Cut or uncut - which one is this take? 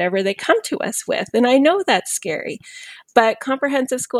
uncut